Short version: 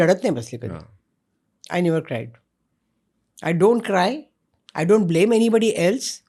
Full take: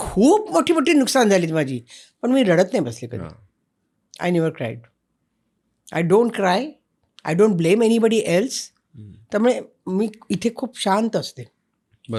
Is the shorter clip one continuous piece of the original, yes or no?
yes